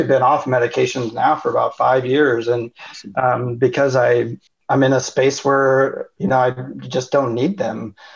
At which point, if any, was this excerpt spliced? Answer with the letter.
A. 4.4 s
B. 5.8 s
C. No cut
A